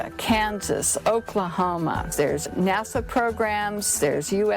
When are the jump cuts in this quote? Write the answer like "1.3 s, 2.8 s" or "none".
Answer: 2.5 s